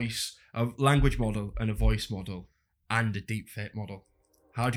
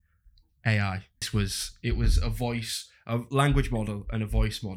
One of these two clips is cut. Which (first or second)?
second